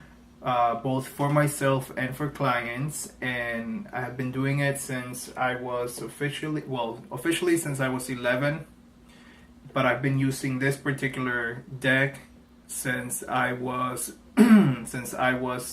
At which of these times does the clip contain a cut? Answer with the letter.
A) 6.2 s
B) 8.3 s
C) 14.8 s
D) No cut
A